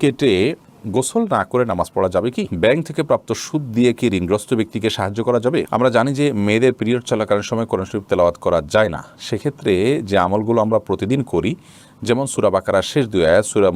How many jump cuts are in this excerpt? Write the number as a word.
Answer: two